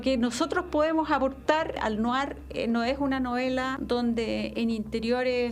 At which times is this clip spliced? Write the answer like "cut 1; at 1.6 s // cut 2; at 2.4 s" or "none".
cut 1; at 1.8 s // cut 2; at 3.8 s